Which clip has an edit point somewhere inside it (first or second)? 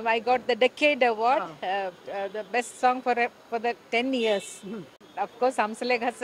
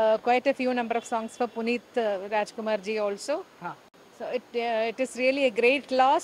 first